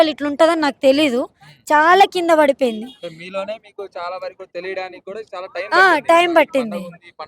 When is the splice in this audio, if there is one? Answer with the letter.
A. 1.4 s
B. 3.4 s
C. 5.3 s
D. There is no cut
D